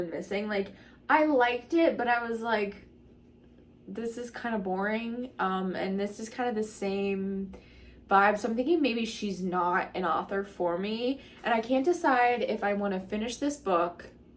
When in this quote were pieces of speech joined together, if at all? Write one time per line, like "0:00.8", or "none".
none